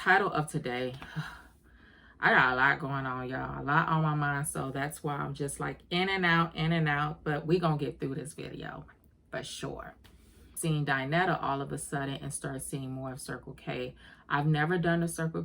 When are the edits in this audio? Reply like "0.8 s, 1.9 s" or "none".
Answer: 10.5 s

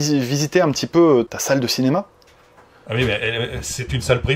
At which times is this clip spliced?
1.3 s

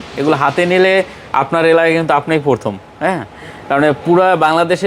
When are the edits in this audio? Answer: none

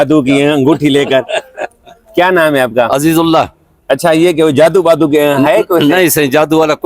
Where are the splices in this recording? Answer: none

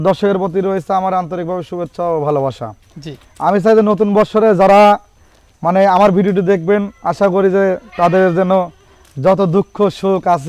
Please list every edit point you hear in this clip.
none

